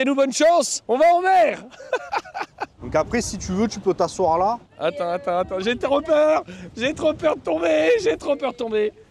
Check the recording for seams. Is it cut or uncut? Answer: uncut